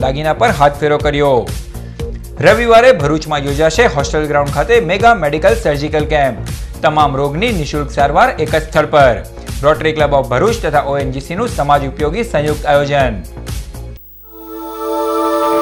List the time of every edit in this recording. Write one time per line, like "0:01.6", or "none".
0:14.5

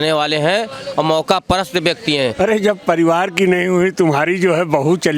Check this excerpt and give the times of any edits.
0:02.3

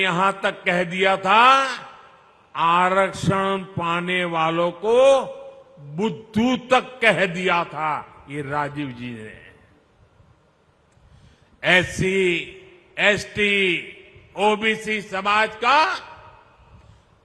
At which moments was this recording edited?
none

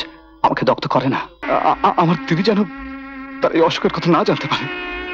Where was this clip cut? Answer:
0:01.3

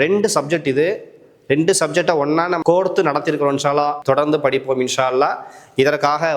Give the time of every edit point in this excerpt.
0:02.6
0:04.0

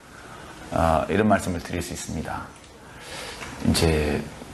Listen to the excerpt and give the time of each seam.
none

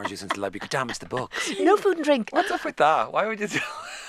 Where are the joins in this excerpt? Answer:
0:02.3

